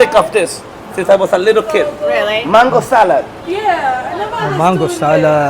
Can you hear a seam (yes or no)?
no